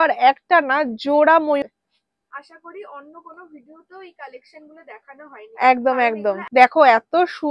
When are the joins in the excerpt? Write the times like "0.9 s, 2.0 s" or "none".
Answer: 1.6 s, 6.4 s